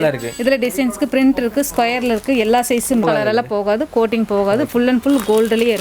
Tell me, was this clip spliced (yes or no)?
yes